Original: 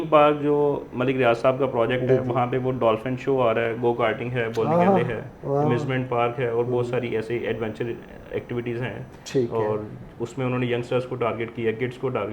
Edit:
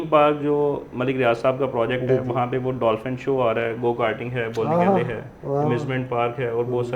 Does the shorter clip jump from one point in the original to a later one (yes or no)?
no